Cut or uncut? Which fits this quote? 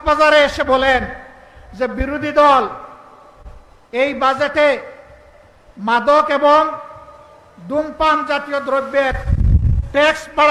uncut